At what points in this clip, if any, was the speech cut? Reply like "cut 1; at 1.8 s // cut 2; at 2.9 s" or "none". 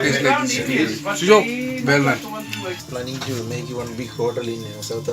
cut 1; at 2.8 s